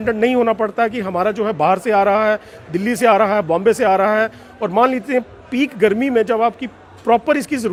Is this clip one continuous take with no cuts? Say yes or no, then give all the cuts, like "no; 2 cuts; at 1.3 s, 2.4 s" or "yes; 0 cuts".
yes; 0 cuts